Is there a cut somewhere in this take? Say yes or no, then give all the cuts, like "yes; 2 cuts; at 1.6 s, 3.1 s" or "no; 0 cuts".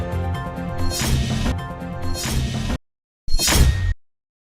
yes; 1 cut; at 1.5 s